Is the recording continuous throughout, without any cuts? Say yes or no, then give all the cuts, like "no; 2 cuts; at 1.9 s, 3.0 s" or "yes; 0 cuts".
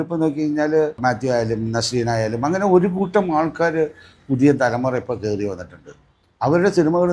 no; 1 cut; at 0.9 s